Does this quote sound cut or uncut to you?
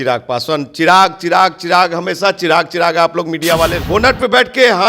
cut